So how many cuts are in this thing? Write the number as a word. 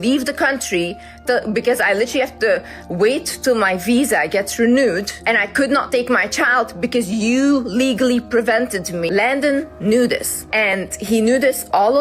three